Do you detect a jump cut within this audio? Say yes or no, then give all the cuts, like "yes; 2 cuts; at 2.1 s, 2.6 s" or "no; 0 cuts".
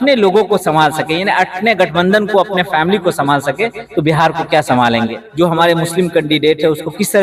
yes; 1 cut; at 5.2 s